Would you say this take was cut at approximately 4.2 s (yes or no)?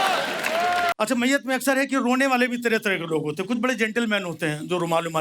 no